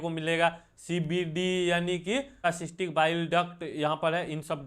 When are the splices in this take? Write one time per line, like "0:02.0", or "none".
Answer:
0:02.4